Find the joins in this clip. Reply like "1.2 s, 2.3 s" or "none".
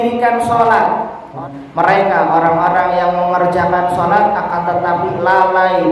1.3 s